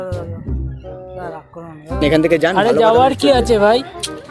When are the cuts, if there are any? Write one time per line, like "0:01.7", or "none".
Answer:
0:02.0